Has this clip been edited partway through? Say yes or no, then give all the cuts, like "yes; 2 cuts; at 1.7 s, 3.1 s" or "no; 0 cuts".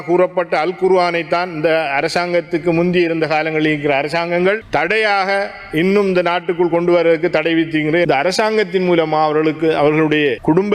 yes; 2 cuts; at 4.6 s, 8.1 s